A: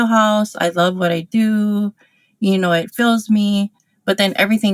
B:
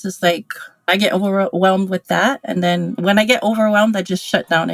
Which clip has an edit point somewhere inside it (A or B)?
B